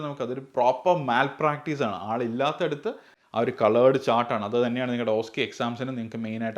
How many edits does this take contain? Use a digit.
1